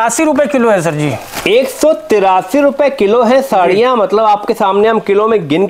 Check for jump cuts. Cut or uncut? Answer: uncut